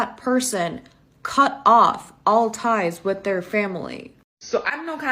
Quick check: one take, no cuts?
no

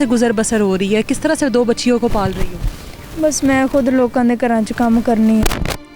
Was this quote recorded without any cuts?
yes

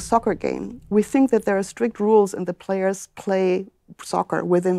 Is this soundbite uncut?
yes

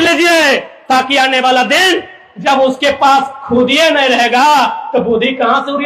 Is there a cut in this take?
no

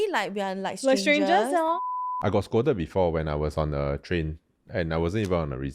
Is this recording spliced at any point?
yes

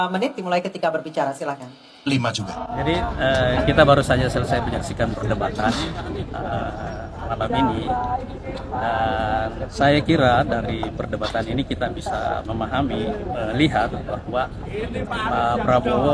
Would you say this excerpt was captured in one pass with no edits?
no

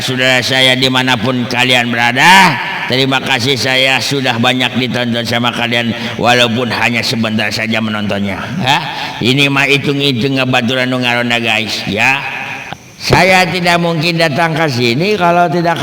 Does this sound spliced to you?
yes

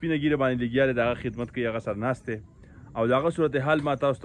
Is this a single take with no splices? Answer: yes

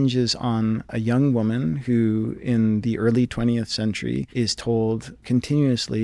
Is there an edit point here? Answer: yes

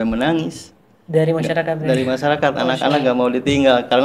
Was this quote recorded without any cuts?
yes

